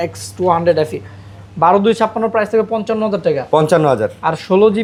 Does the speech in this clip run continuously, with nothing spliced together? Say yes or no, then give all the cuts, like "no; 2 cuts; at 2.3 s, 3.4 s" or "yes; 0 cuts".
yes; 0 cuts